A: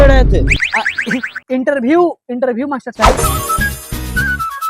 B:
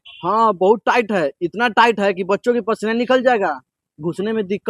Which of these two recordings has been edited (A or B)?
A